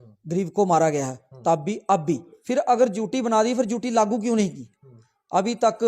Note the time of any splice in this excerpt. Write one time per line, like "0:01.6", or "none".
0:02.3